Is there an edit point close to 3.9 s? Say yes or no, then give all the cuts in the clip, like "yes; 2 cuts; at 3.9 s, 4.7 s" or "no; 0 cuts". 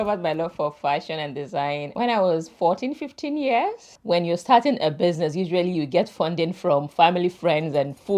yes; 2 cuts; at 1.9 s, 3.9 s